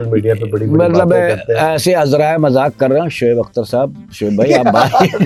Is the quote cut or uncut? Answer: uncut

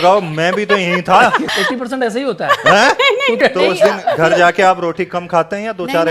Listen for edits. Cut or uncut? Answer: cut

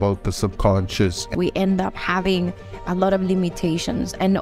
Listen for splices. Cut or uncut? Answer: cut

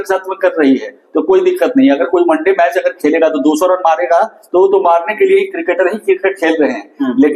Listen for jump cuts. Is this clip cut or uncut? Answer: uncut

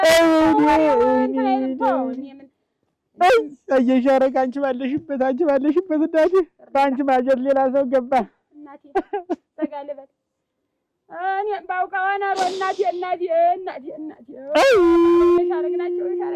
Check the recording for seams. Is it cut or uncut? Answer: uncut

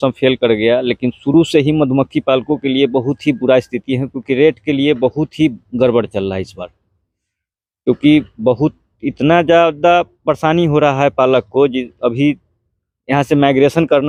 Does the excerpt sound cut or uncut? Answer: uncut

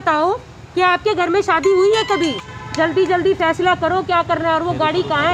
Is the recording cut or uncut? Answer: cut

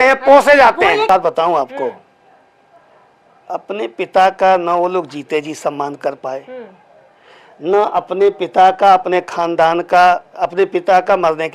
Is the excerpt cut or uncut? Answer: cut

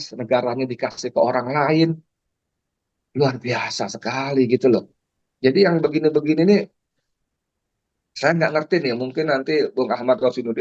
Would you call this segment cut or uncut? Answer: uncut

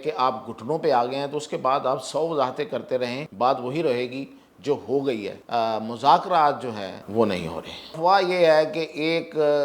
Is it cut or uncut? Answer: cut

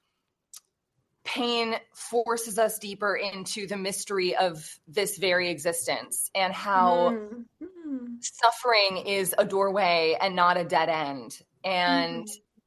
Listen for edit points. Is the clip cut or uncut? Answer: uncut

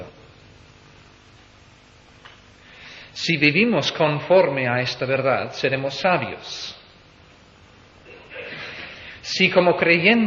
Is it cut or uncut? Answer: uncut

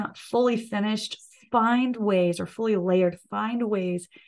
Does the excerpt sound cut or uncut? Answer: uncut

